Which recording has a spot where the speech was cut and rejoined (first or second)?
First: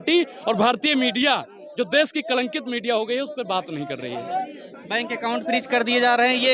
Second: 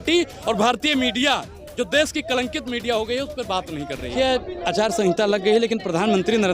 second